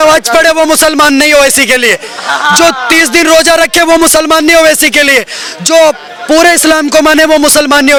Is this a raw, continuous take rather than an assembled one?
yes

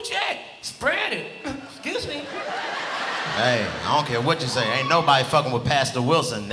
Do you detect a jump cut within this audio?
no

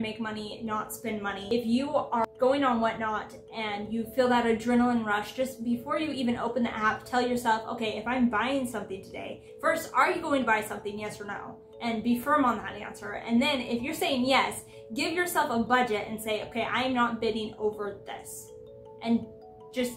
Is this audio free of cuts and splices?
no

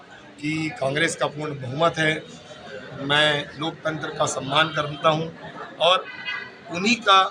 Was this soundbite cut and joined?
no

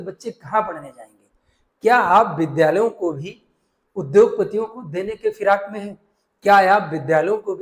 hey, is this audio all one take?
yes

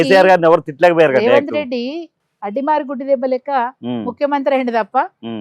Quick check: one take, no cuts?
yes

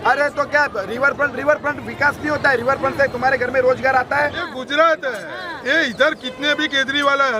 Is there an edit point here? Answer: yes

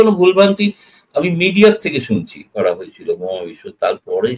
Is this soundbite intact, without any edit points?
no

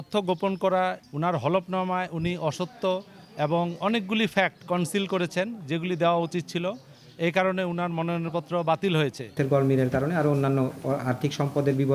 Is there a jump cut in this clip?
yes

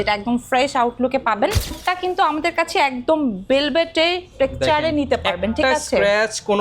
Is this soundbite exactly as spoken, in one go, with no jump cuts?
no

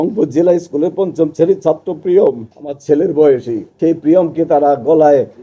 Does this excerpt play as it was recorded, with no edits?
yes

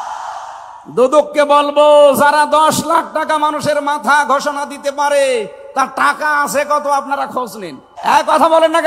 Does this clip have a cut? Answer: yes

